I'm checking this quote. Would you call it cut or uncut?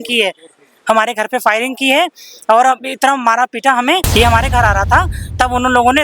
cut